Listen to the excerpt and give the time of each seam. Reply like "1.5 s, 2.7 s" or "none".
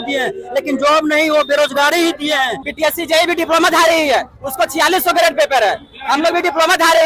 2.6 s